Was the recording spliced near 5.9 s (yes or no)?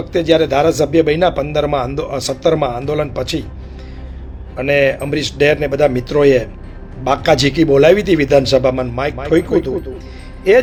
no